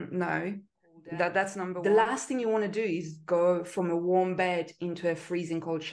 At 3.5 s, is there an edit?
no; 1 cut; at 1.7 s

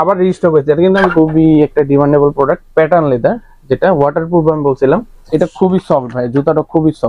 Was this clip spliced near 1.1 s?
yes; 2 cuts; at 1.1 s, 5.3 s

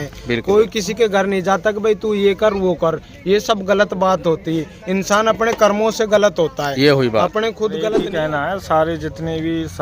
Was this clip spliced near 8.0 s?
yes; 1 cut; at 8.0 s

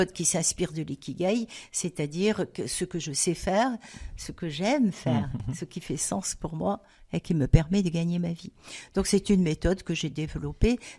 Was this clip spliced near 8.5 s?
no; 1 cut; at 5.4 s

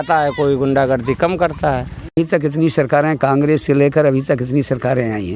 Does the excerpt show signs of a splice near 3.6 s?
no; 1 cut; at 2.1 s

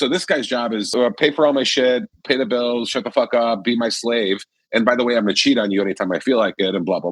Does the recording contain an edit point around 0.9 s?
yes; 1 cut; at 0.9 s

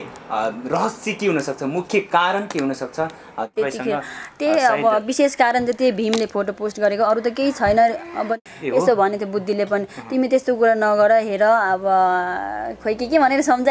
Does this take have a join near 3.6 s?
yes; 2 cuts; at 3.6 s, 8.2 s

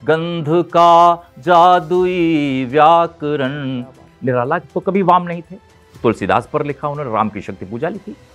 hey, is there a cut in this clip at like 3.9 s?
yes; 1 cut; at 3.9 s

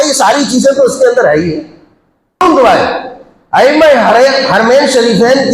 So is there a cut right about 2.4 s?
yes; 1 cut; at 2.4 s

